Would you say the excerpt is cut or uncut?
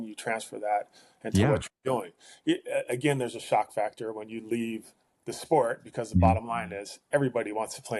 uncut